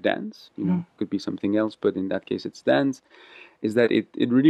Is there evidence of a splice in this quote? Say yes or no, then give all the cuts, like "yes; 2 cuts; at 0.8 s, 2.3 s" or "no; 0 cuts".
no; 0 cuts